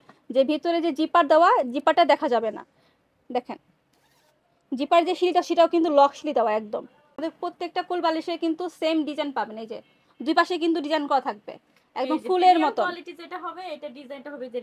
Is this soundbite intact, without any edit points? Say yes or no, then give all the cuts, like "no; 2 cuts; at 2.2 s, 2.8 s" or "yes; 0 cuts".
no; 1 cut; at 7.2 s